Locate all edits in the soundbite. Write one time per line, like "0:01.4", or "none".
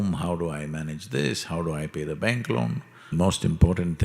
0:03.1